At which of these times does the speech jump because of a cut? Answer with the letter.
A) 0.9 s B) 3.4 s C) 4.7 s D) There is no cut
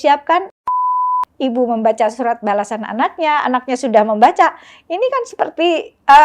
A